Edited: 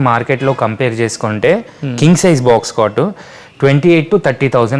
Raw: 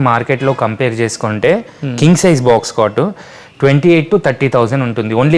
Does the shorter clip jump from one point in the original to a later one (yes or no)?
no